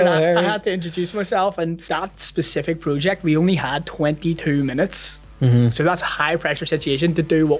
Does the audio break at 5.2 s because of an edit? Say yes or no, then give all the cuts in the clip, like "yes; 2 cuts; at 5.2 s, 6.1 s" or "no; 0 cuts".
no; 1 cut; at 1.8 s